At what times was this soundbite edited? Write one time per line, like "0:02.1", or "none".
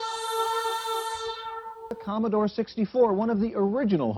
0:01.9